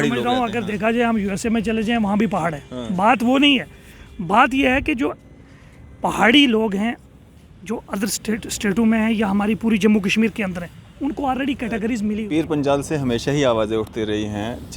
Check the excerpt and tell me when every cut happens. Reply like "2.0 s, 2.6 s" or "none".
12.2 s